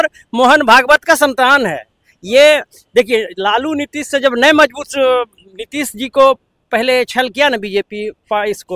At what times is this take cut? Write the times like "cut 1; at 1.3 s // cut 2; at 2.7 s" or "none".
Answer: none